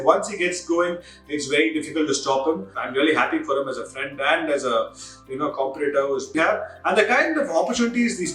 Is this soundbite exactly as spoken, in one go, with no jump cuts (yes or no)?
no